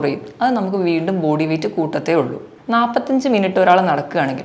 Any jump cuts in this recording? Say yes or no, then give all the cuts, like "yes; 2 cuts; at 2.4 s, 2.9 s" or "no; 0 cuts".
yes; 1 cut; at 2.5 s